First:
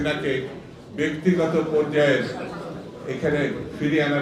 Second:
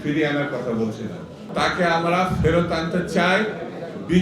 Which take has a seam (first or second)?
second